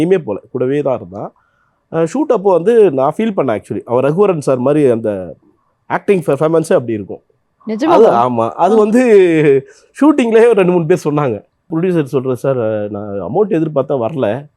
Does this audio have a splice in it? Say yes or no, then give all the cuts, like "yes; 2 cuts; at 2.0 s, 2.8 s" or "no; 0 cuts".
yes; 1 cut; at 11.7 s